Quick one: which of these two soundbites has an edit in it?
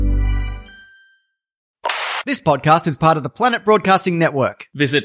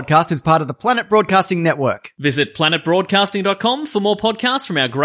first; 1 cut; at 1.6 s

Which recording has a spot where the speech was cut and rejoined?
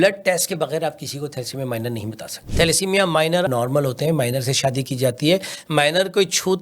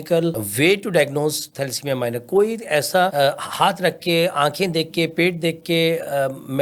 first; 2 cuts; at 2.4 s, 3.5 s

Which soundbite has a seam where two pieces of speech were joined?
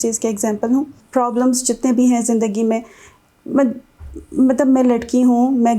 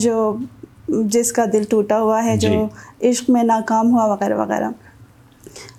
first; 1 cut; at 1.0 s

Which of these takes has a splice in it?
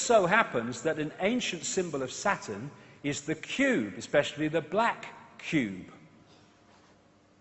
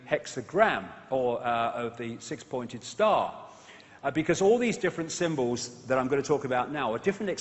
second; 1 cut; at 1.7 s

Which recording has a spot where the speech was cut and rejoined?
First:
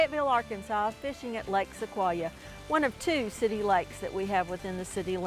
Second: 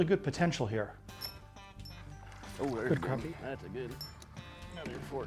second; 1 cut; at 0.9 s

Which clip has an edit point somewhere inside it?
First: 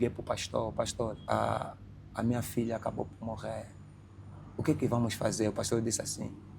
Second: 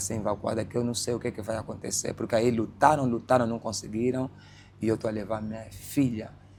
first; 1 cut; at 1.2 s

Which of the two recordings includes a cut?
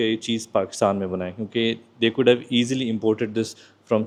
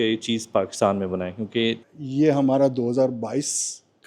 second; 1 cut; at 1.9 s

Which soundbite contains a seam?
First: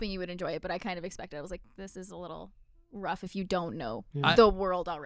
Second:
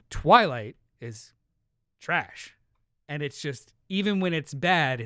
first; 1 cut; at 4.1 s

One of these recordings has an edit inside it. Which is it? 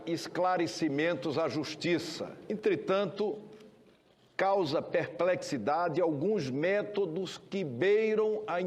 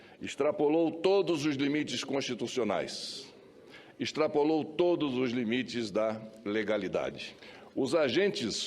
second; 1 cut; at 7.2 s

